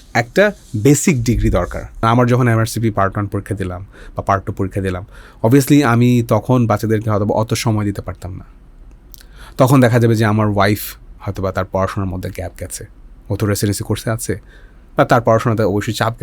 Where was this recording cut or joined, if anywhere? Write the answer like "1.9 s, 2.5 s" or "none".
1.9 s